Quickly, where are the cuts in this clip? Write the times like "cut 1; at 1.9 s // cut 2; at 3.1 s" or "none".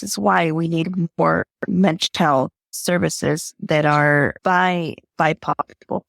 cut 1; at 2.7 s // cut 2; at 4.4 s